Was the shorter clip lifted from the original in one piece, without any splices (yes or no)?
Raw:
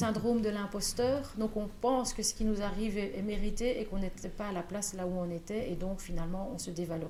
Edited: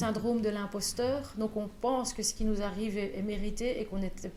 yes